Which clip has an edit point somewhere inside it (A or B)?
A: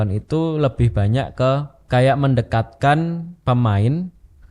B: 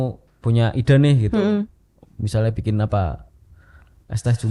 A